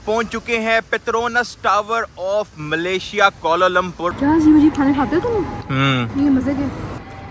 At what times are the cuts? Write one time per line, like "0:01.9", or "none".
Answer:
0:04.1